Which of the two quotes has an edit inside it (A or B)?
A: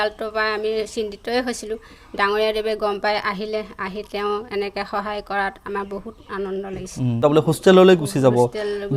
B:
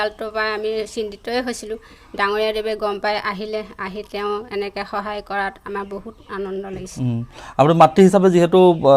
A